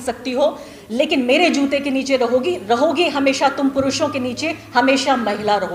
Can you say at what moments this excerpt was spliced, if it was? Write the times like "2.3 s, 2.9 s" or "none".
none